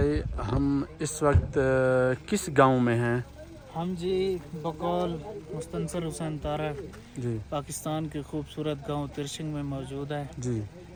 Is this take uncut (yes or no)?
yes